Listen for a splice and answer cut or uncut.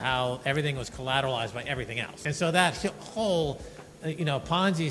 cut